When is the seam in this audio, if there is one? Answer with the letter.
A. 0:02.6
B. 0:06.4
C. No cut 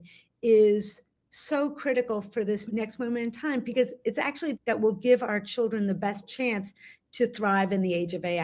A